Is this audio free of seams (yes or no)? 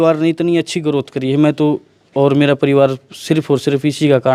yes